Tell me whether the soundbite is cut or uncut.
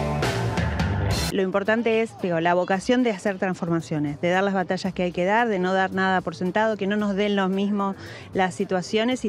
cut